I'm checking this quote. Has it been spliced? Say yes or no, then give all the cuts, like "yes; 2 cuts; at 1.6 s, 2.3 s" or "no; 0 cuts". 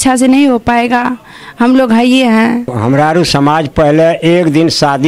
yes; 1 cut; at 2.8 s